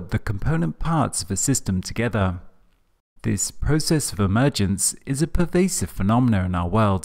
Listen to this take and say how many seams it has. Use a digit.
1